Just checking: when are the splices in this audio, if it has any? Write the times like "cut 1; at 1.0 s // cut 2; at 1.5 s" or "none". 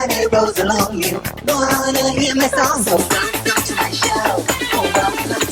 none